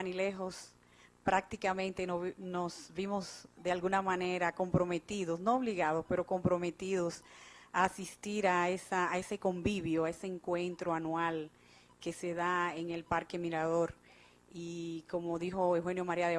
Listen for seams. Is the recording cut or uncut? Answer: uncut